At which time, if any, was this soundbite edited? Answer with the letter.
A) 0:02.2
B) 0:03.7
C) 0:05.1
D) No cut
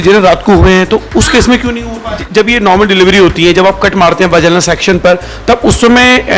A